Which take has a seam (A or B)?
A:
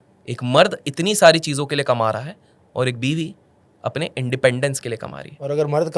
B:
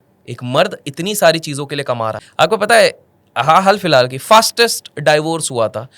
B